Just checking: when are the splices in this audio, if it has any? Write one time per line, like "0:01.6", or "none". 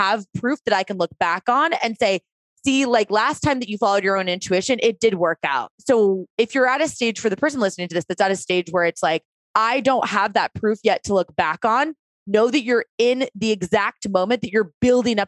0:05.7
0:09.4